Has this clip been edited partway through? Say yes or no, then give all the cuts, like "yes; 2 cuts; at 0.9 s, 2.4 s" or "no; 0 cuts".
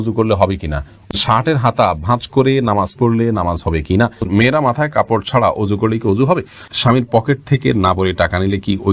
yes; 3 cuts; at 1.1 s, 4.3 s, 6.7 s